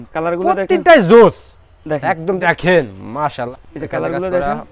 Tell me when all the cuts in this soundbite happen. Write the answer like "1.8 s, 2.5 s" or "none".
2.4 s, 3.5 s